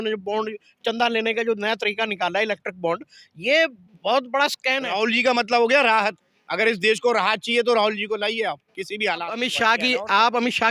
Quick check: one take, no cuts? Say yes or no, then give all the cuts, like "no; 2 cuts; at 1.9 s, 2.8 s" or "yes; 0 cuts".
no; 2 cuts; at 4.9 s, 9.3 s